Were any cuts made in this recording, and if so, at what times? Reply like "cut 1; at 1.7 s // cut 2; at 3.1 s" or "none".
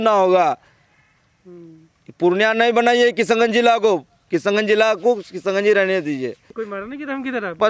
cut 1; at 6.5 s